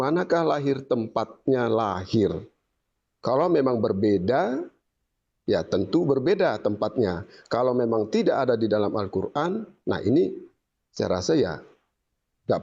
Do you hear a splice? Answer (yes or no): no